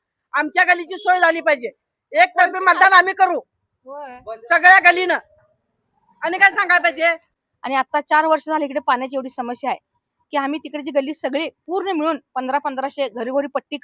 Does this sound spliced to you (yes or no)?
yes